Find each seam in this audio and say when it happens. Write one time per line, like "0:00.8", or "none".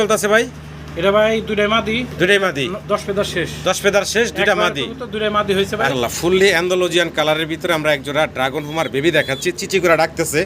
0:05.9